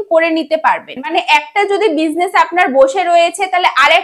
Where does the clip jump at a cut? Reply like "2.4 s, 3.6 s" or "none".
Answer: 1.0 s